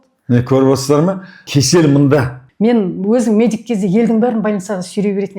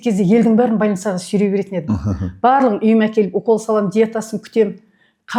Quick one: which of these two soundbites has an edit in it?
first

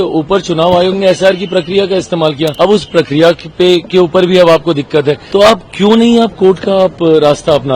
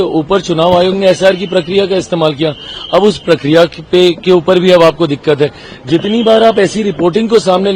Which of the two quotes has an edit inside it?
first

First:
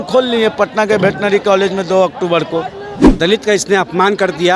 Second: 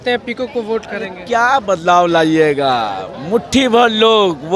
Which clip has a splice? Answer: first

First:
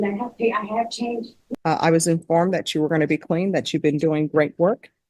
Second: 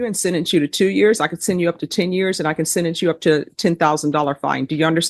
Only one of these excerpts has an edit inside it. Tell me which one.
first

